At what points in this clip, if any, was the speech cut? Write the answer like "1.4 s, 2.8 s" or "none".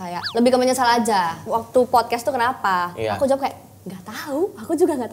1.4 s